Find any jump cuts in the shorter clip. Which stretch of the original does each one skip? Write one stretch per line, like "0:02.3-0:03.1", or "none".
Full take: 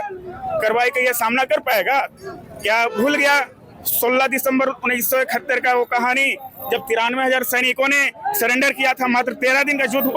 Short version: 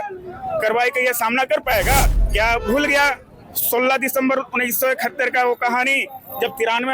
0:02.2-0:02.5